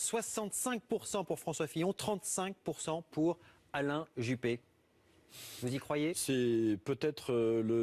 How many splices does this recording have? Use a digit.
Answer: 0